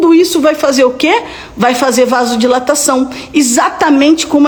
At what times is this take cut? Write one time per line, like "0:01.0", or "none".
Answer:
none